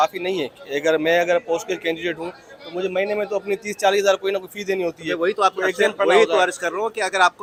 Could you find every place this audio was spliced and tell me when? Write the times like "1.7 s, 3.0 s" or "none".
none